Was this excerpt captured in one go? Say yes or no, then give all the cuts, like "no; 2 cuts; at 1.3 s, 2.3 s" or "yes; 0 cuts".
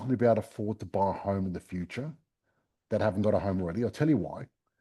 yes; 0 cuts